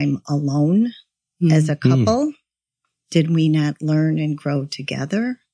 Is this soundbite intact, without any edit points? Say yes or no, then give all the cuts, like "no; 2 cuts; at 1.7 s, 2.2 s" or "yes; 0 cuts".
yes; 0 cuts